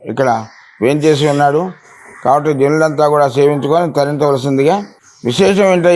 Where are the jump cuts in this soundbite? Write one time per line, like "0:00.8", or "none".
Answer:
none